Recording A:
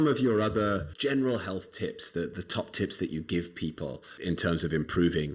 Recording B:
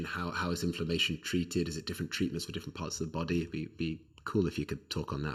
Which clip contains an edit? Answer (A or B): A